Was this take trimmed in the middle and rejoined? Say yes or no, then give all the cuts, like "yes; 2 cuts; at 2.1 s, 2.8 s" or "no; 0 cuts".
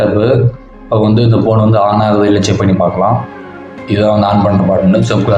no; 0 cuts